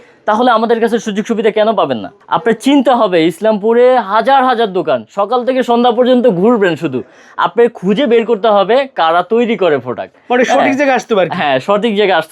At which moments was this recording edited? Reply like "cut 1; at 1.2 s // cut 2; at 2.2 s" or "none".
cut 1; at 2.2 s